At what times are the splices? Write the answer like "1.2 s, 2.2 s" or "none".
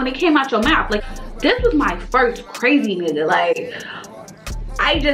1.0 s